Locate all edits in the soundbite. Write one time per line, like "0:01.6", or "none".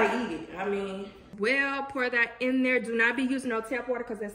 0:01.3